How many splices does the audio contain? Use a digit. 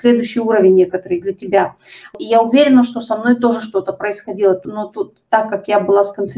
2